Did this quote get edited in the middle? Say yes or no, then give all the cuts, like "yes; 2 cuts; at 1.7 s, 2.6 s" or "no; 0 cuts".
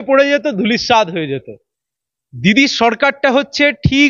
no; 0 cuts